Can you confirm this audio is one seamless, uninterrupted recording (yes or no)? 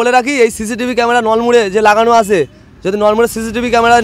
yes